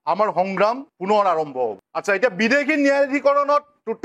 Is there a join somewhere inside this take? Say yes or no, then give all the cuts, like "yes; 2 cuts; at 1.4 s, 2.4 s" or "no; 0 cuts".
yes; 1 cut; at 1.8 s